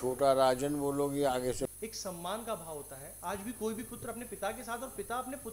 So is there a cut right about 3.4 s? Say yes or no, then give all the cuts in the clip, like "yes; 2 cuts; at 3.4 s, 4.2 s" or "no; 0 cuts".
no; 1 cut; at 1.7 s